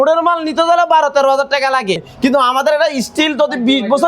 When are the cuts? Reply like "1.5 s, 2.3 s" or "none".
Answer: 2.1 s